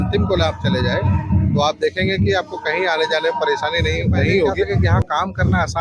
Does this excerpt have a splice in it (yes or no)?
yes